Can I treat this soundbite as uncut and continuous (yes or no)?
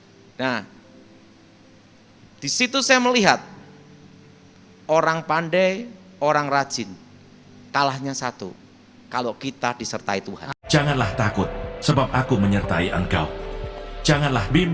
no